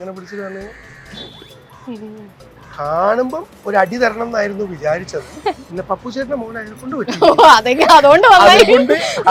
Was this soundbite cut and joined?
no; 0 cuts

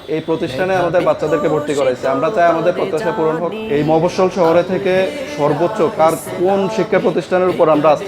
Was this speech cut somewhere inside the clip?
yes; 1 cut; at 3.6 s

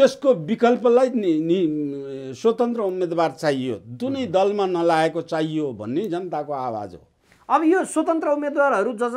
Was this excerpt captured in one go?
yes; 0 cuts

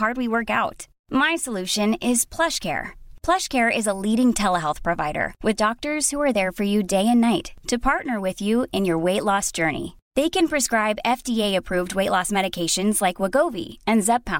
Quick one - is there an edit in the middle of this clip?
no; 0 cuts

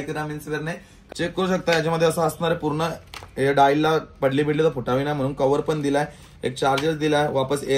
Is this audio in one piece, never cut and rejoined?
no; 1 cut; at 0.9 s

